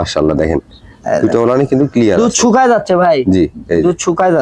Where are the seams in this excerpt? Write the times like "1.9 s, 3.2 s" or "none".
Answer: none